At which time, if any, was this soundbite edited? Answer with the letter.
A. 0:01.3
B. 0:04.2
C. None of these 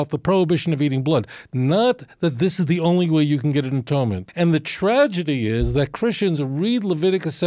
B